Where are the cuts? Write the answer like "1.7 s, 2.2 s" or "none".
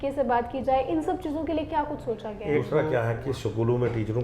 2.7 s